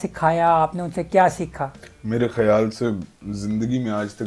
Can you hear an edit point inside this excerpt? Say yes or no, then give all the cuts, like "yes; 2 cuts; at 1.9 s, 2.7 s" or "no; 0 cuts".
no; 0 cuts